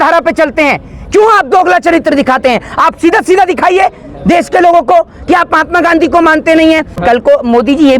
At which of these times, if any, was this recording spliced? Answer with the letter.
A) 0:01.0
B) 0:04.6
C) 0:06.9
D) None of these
C